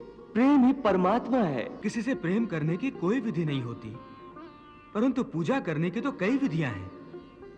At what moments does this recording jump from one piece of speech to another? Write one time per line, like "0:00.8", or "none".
0:01.8